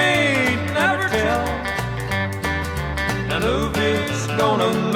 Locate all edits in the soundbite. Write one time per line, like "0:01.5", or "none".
none

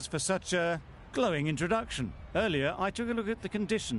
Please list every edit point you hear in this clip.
none

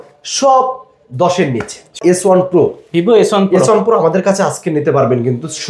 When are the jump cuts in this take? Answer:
0:02.0

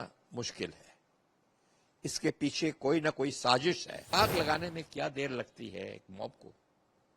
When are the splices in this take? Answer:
0:04.1

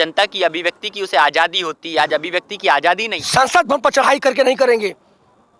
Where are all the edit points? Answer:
0:03.1

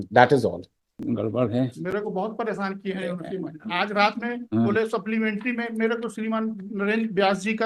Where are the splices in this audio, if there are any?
0:01.0

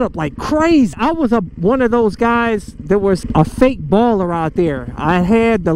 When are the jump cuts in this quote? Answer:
0:00.9
0:03.2

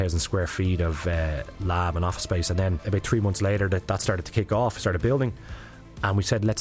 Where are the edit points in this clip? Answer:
0:02.8

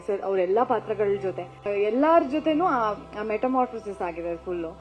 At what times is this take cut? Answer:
0:01.6

